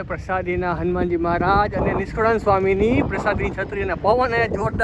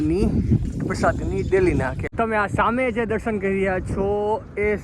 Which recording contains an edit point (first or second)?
second